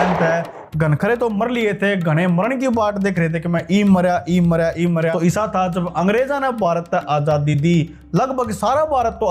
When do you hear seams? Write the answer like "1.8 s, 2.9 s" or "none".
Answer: 5.1 s